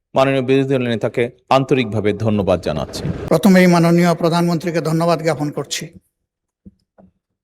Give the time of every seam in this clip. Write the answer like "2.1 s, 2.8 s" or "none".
3.2 s